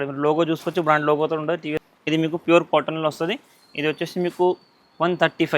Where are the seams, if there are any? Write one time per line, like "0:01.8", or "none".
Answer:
0:01.8